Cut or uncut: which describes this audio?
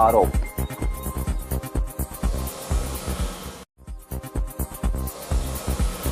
uncut